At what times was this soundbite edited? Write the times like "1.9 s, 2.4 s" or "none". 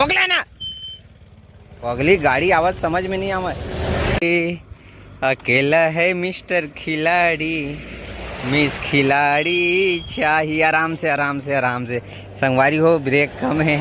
4.2 s